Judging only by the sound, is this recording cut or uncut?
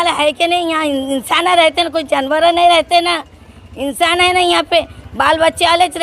uncut